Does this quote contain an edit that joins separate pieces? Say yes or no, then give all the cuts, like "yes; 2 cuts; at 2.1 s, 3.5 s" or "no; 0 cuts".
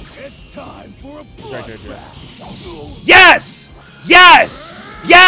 no; 0 cuts